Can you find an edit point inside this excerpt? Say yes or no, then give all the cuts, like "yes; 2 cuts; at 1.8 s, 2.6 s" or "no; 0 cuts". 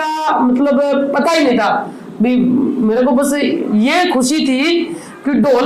no; 0 cuts